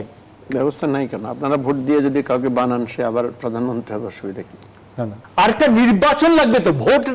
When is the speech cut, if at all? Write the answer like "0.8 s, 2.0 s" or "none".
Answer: 5.2 s